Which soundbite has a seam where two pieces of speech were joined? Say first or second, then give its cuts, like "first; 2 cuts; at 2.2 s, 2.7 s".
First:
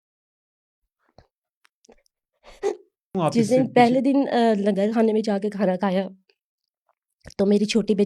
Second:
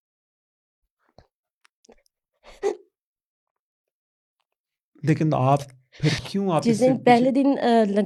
first; 1 cut; at 3.1 s